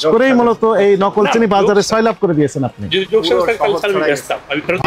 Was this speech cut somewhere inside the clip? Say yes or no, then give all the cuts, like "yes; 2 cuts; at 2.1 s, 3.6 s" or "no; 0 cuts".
no; 0 cuts